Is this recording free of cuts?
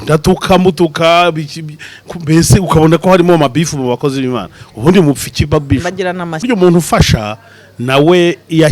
no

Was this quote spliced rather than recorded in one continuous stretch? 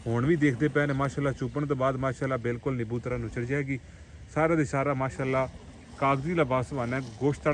no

